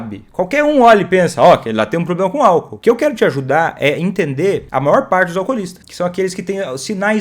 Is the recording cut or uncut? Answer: cut